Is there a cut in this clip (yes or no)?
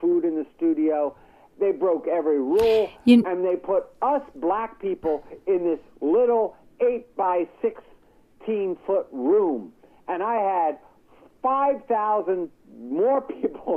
no